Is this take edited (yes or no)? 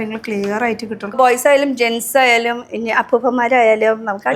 yes